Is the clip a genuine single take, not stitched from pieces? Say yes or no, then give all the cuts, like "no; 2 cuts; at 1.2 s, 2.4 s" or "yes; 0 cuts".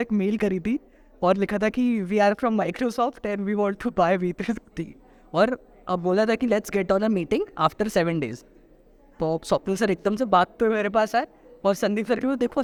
yes; 0 cuts